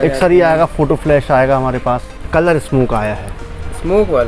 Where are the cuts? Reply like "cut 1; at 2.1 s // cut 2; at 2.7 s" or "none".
cut 1; at 2.2 s